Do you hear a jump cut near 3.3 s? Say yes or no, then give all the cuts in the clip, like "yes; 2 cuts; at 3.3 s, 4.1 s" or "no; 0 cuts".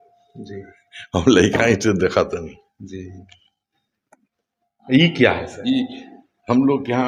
no; 0 cuts